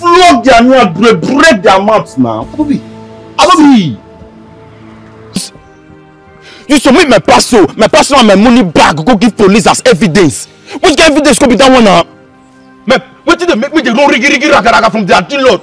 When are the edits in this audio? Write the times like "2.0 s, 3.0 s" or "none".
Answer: 5.4 s